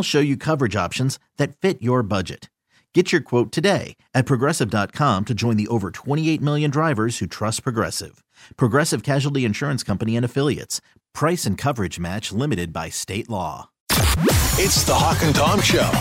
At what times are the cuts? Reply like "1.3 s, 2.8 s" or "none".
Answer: 13.8 s